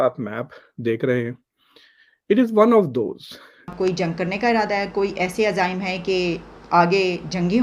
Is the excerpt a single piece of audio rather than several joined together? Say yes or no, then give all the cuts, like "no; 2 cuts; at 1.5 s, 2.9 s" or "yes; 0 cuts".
no; 1 cut; at 3.7 s